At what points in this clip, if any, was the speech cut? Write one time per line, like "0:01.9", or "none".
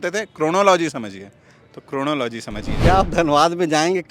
0:02.7

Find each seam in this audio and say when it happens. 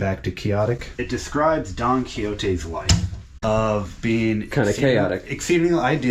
0:00.9
0:03.2

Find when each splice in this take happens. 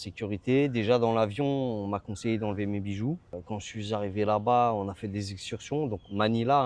none

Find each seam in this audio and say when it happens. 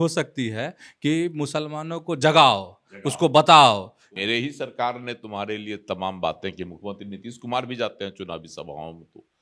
0:04.0

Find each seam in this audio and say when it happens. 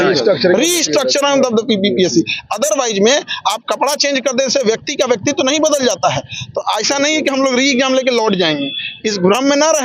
none

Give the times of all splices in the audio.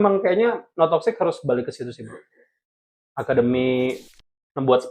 0:04.0

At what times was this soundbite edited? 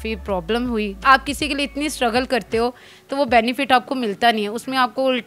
0:01.0

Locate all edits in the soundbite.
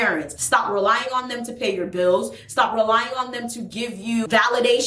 none

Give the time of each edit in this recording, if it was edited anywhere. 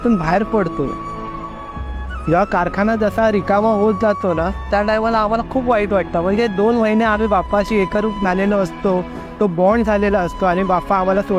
none

